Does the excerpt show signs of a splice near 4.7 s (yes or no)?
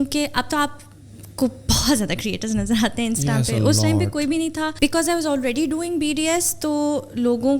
yes